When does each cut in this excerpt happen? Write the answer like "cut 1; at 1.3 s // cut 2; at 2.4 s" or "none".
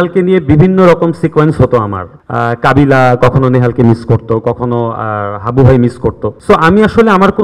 none